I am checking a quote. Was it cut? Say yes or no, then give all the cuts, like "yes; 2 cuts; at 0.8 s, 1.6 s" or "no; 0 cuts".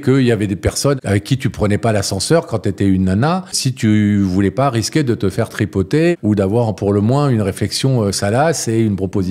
yes; 3 cuts; at 1.0 s, 3.6 s, 6.1 s